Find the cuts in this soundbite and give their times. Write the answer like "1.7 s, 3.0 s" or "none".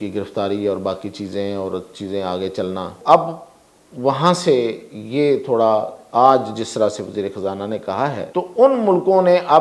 3.0 s, 8.3 s